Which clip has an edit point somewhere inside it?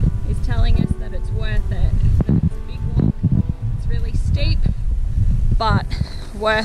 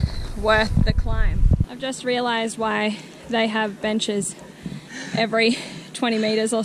second; 1 cut; at 1.7 s

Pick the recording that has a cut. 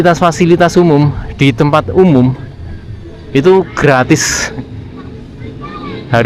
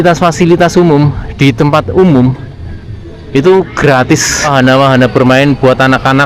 second; 1 cut; at 4.5 s

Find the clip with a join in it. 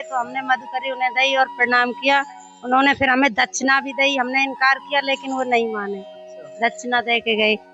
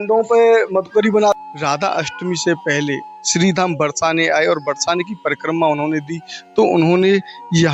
second; 1 cut; at 1.4 s

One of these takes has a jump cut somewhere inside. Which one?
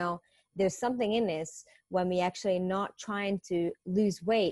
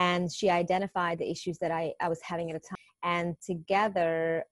second; 1 cut; at 2.7 s

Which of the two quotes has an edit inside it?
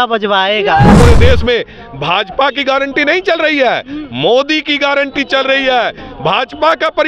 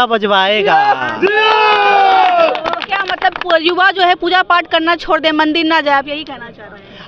first; 1 cut; at 1.0 s

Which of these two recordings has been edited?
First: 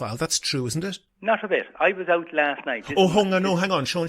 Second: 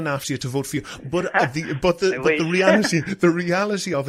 first; 1 cut; at 1.1 s

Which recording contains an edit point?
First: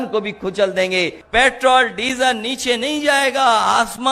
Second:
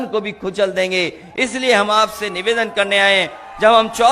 first; 1 cut; at 1.2 s

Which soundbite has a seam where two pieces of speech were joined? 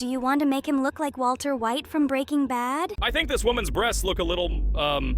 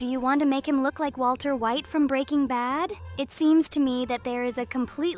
first; 1 cut; at 3.0 s

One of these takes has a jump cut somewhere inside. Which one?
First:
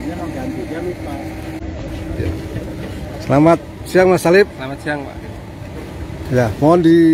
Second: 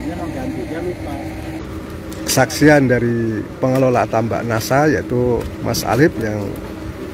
second; 1 cut; at 1.6 s

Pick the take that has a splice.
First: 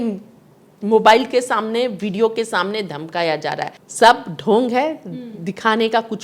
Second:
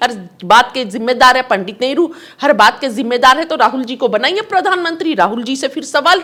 first; 1 cut; at 3.8 s

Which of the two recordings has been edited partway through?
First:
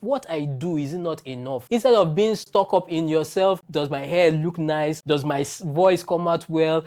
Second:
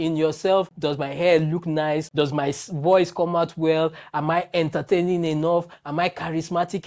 first; 1 cut; at 1.6 s

